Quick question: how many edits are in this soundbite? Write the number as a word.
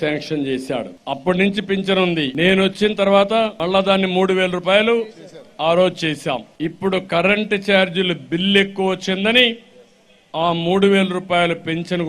four